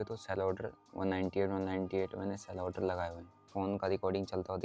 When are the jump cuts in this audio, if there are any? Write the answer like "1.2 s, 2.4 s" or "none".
3.5 s